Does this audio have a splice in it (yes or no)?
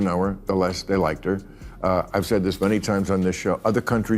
yes